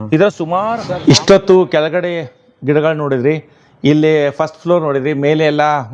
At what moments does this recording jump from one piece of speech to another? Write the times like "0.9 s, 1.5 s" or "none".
0.9 s